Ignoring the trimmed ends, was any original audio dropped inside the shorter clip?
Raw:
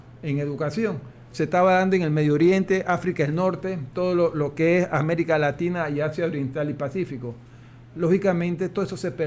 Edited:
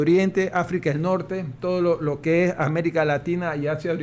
no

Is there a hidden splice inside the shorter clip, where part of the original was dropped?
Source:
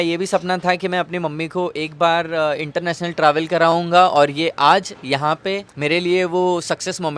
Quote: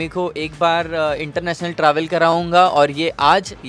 no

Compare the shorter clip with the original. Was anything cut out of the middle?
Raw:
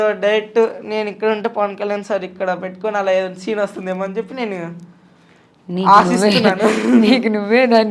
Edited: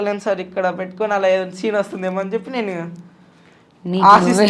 no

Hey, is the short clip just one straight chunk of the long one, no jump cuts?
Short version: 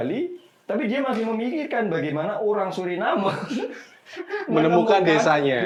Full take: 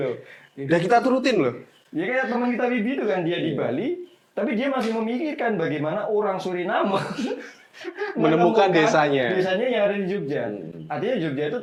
yes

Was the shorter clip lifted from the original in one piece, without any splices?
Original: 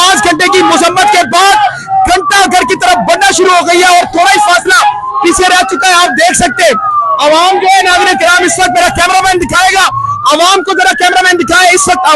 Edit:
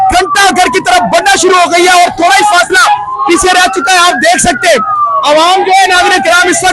yes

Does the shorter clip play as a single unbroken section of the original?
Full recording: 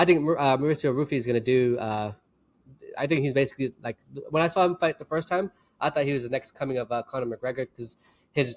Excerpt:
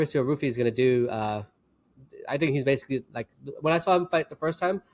yes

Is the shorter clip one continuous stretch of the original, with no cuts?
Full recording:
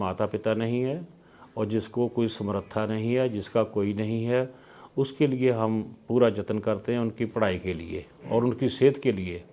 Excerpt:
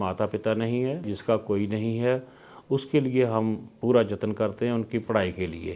no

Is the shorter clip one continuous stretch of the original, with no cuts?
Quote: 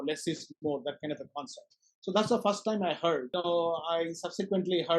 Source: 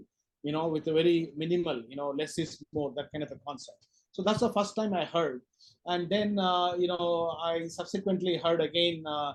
no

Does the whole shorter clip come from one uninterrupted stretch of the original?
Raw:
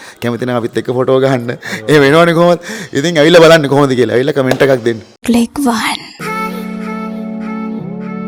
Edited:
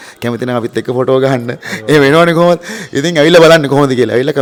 yes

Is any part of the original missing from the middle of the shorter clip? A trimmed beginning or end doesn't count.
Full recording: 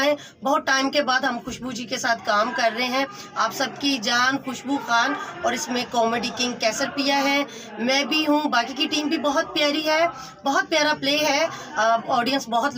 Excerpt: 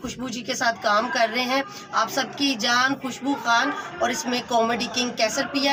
no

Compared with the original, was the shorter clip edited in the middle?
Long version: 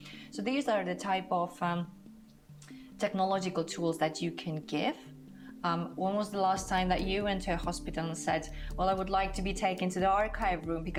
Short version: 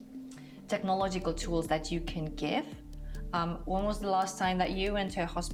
no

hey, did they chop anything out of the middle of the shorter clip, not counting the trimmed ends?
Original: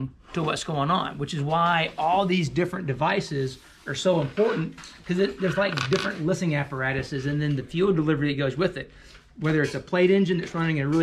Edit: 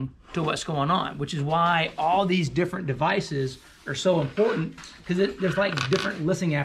no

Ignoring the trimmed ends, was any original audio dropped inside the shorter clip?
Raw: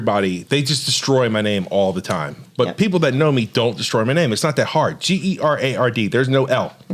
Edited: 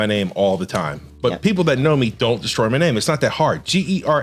no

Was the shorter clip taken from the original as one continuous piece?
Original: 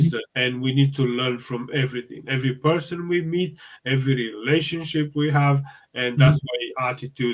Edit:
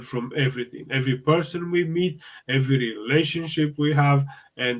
yes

